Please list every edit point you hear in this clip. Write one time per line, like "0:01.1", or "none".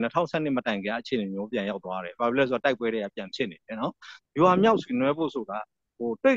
0:04.2